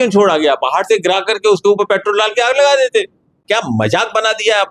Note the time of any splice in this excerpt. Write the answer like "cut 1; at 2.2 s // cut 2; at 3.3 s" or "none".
cut 1; at 3.5 s